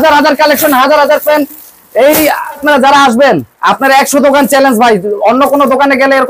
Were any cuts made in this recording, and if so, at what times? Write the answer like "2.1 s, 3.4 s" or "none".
none